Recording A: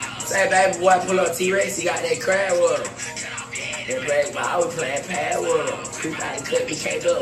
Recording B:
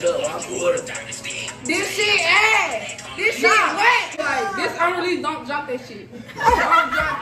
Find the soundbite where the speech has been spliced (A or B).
B